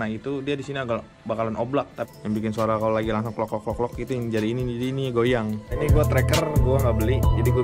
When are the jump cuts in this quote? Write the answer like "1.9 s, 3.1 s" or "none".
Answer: 2.1 s, 5.8 s